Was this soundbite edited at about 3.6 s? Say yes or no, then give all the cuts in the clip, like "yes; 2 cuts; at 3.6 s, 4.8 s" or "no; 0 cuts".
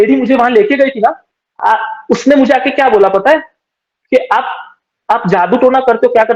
no; 0 cuts